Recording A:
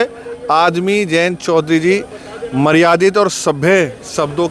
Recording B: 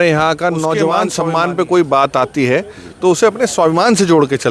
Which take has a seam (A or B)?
B